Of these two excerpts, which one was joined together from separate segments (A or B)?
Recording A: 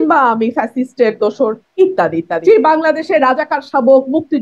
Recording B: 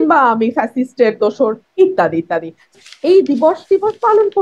A